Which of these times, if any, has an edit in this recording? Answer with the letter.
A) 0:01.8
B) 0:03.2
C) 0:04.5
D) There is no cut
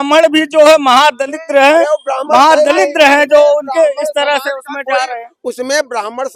D